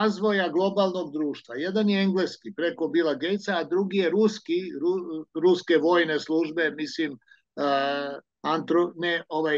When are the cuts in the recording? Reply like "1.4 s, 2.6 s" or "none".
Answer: none